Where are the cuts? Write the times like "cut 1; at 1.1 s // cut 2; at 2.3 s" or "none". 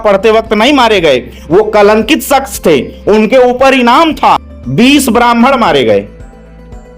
cut 1; at 4.5 s